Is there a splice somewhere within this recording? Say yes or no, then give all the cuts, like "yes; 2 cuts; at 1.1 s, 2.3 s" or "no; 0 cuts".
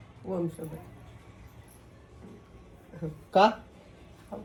no; 0 cuts